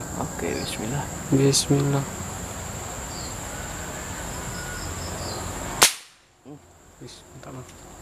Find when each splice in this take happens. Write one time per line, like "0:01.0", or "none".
0:02.4